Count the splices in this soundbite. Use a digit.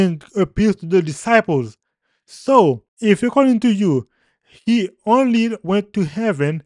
1